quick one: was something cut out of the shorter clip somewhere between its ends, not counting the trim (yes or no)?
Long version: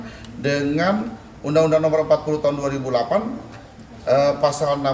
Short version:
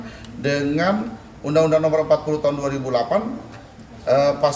no